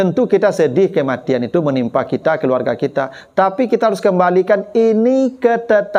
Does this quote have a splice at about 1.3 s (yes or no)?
no